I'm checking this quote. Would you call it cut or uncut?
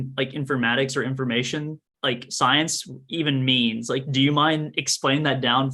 uncut